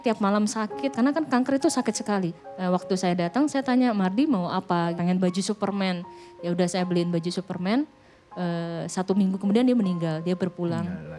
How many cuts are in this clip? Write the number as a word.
two